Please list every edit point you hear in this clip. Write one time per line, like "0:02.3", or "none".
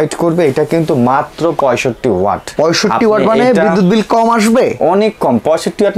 0:02.5